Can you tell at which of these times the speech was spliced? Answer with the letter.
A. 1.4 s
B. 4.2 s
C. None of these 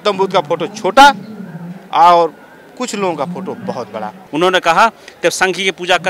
B